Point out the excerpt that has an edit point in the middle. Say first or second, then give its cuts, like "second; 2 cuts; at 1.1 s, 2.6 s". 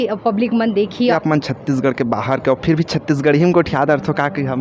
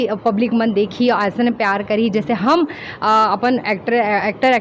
first; 1 cut; at 1.1 s